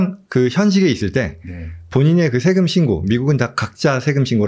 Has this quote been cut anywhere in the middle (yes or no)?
no